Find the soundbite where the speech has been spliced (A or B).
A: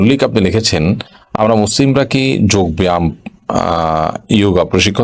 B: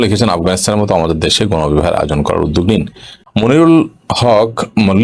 B